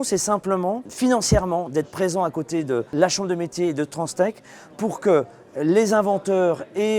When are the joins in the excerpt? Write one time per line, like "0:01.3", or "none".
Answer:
0:00.9
0:02.9